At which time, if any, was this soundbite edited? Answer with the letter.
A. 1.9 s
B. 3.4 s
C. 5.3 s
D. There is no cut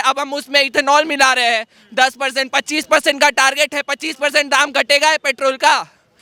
D